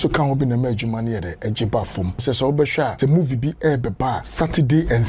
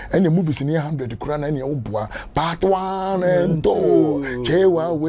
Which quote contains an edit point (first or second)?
first